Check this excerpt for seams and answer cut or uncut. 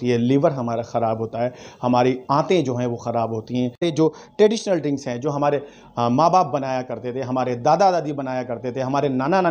cut